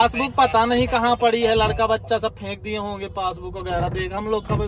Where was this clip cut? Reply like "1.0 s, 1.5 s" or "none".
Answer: none